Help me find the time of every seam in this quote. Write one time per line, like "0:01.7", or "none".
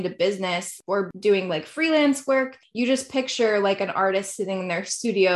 0:00.8
0:02.6